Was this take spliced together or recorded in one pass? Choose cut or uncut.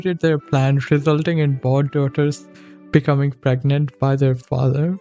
uncut